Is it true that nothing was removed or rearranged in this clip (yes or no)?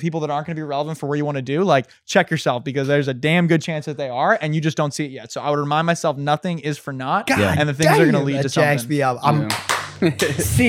yes